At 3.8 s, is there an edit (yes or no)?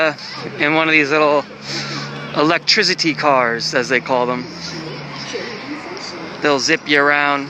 yes